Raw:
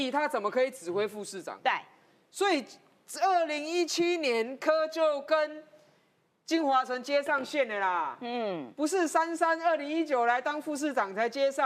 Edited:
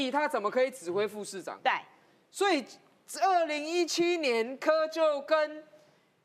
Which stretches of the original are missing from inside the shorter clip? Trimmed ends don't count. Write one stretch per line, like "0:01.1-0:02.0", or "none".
none